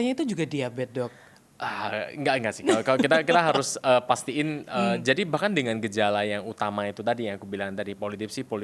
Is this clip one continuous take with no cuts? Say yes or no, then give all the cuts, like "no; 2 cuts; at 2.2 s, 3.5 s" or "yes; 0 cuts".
yes; 0 cuts